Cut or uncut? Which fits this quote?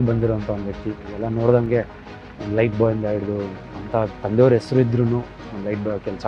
uncut